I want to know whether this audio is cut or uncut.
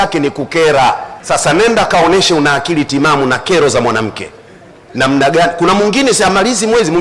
cut